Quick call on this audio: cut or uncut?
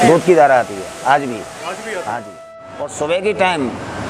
cut